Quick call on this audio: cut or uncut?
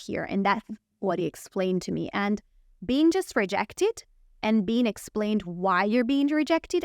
uncut